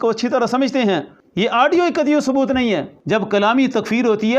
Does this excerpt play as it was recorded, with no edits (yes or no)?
no